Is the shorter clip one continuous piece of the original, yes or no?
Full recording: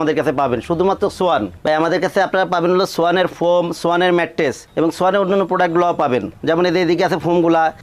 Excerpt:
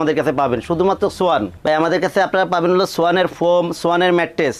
yes